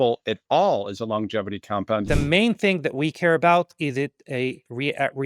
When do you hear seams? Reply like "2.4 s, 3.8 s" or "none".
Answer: 2.0 s